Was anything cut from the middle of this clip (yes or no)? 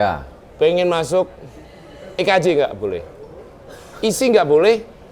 no